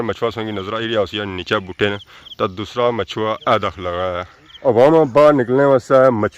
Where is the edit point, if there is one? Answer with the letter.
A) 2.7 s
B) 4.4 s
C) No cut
B